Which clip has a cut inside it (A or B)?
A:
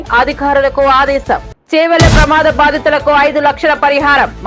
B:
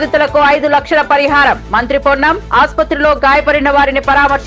A